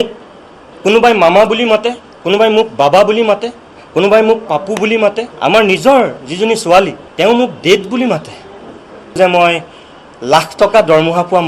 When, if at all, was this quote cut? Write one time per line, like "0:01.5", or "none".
0:05.3
0:07.0
0:09.2